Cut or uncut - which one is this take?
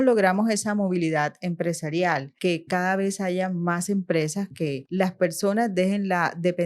cut